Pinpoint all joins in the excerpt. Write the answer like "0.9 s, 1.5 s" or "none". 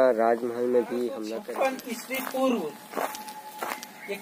1.3 s